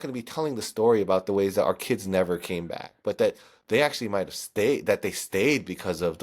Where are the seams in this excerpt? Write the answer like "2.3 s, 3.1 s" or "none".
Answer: none